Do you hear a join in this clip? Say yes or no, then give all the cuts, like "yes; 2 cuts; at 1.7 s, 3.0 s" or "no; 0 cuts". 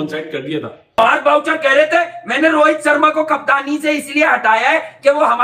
yes; 1 cut; at 0.9 s